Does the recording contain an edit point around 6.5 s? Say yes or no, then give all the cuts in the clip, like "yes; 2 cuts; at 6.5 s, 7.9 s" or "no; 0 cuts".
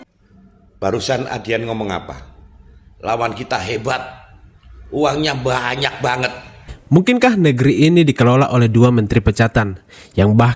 yes; 1 cut; at 6.5 s